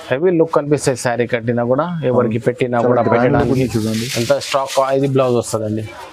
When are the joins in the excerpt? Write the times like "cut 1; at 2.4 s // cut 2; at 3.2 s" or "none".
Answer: none